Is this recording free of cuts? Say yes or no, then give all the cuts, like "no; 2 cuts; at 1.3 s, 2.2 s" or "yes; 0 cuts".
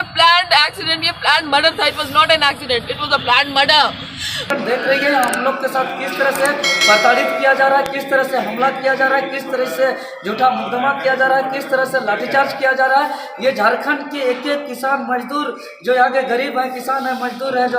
no; 1 cut; at 4.5 s